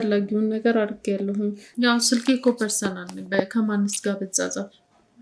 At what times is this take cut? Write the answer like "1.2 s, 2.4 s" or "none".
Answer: 1.6 s